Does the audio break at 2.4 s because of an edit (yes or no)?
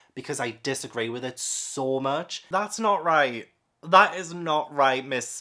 yes